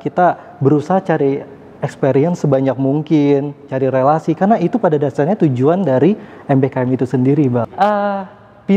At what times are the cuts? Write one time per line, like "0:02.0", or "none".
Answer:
0:07.7